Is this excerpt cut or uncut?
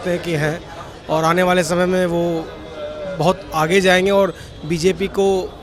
uncut